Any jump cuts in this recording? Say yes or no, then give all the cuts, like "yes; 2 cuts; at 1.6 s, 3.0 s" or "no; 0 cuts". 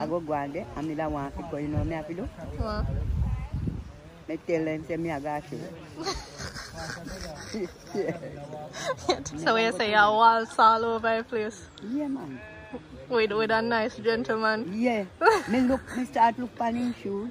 yes; 1 cut; at 9.2 s